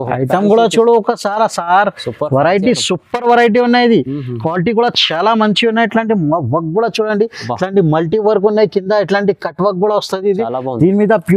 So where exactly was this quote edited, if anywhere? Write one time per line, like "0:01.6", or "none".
none